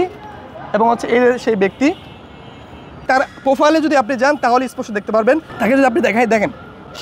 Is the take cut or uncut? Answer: uncut